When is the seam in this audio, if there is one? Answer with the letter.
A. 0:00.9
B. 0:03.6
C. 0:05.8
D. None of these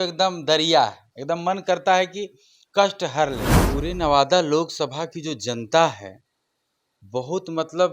B